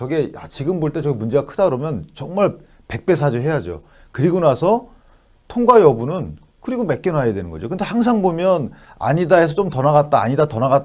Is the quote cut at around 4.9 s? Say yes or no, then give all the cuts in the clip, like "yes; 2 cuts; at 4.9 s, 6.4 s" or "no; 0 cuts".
no; 0 cuts